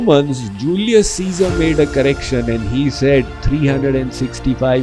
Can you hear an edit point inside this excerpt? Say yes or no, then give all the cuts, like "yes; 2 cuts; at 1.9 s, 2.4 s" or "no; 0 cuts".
no; 0 cuts